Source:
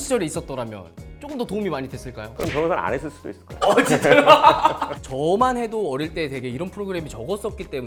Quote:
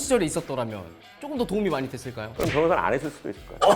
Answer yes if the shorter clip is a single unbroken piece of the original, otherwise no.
yes